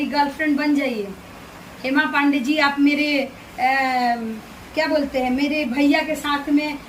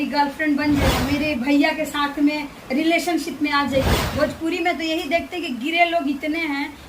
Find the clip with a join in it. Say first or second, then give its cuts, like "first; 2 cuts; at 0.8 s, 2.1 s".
second; 2 cuts; at 1.0 s, 4.0 s